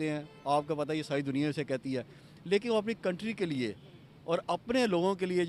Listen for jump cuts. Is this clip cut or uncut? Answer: uncut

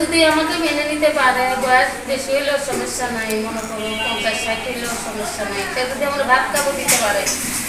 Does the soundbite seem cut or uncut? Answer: uncut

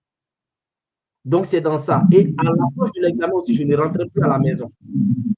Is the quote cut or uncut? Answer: uncut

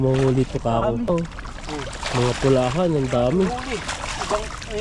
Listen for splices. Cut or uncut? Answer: cut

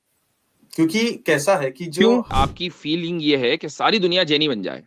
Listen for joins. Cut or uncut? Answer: cut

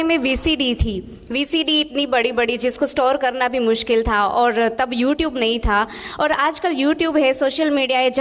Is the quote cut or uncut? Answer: uncut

